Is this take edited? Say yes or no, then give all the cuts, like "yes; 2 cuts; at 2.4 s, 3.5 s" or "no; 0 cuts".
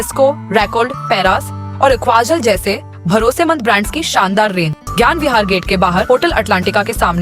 yes; 1 cut; at 4.8 s